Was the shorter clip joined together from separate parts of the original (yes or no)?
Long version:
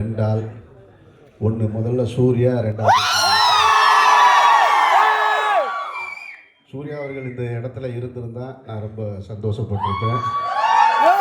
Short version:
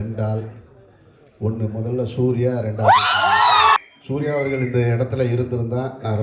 yes